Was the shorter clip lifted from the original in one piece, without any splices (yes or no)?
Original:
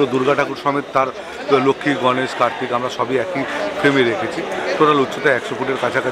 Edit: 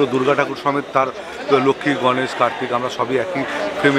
yes